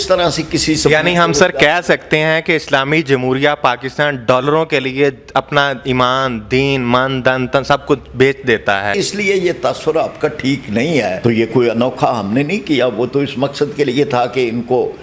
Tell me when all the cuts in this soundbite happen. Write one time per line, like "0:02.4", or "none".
0:08.9
0:11.2